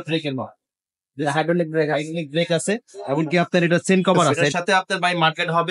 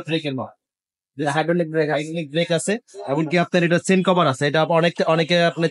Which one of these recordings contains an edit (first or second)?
first